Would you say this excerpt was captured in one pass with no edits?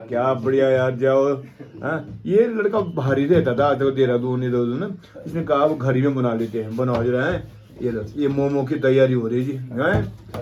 yes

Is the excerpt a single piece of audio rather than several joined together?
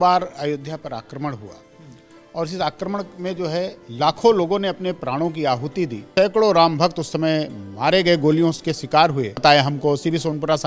no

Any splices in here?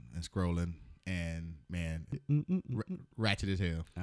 yes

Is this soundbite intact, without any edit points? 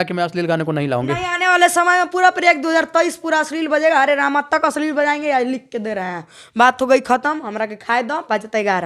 yes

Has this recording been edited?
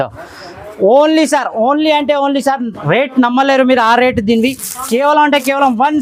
no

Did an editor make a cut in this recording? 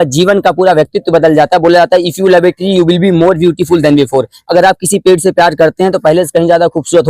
no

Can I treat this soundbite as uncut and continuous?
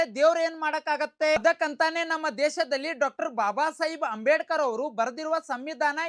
no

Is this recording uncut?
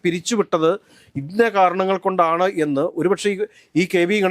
yes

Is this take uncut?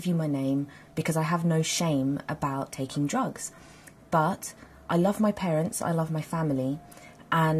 no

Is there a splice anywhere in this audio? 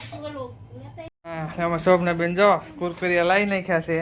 yes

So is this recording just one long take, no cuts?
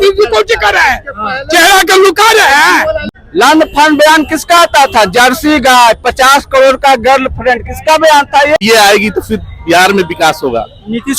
no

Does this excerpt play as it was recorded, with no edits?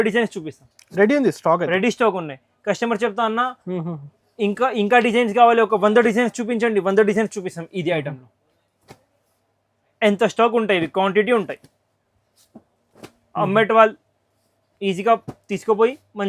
yes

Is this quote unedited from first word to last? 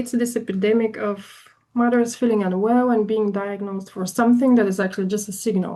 yes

